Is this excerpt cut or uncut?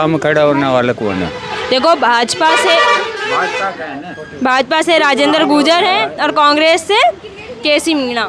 uncut